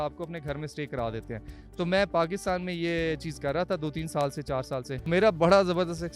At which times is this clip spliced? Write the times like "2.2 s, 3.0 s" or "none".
5.1 s